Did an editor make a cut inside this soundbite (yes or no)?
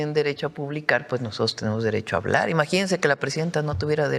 no